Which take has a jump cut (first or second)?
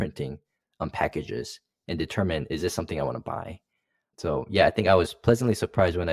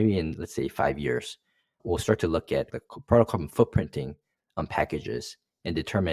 second